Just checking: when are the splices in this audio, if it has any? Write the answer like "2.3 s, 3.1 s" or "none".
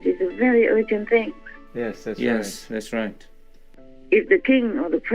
3.6 s